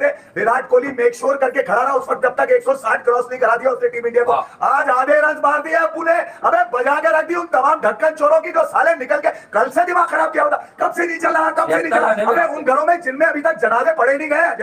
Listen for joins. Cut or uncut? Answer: uncut